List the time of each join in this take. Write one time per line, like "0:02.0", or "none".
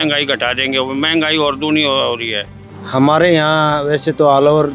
0:02.7